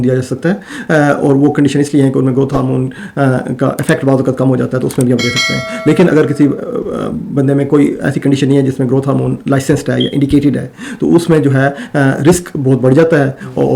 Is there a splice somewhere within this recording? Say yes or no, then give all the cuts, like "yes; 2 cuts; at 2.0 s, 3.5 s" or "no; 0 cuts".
no; 0 cuts